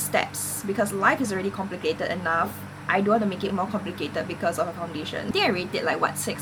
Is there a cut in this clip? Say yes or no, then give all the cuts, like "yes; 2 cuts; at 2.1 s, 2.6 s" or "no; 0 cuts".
no; 0 cuts